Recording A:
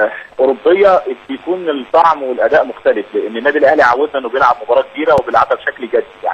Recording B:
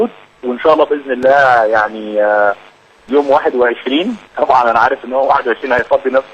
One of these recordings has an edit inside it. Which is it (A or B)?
A